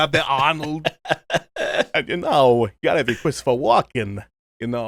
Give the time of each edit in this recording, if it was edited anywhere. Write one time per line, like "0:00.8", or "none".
none